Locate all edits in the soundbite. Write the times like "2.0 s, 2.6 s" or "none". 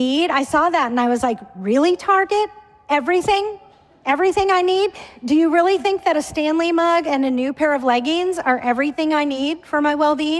none